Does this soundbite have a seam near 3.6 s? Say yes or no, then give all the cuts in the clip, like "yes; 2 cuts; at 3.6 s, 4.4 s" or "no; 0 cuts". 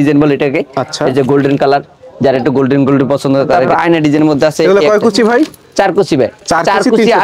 yes; 1 cut; at 3.6 s